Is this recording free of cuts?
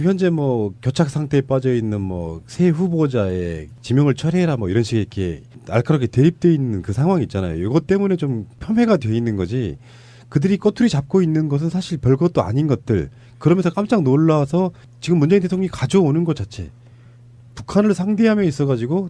yes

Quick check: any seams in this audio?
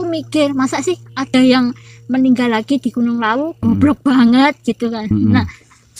no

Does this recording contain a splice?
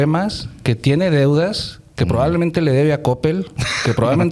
no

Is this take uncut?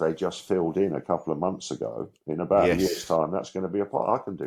yes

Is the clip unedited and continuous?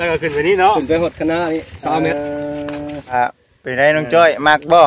no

